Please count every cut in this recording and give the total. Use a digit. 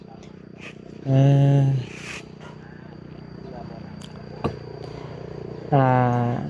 0